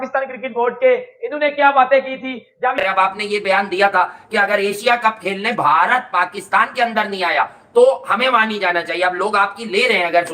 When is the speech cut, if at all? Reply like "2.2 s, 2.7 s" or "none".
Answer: 2.7 s